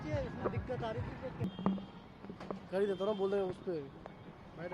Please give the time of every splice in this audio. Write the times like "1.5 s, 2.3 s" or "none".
none